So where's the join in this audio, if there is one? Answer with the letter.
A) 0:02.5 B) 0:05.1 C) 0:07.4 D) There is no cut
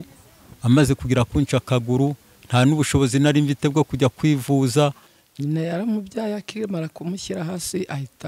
B